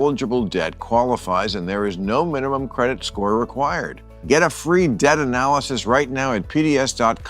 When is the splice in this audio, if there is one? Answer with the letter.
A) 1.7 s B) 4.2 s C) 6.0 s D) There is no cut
B